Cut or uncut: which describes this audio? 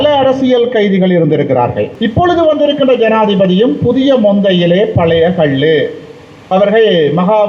cut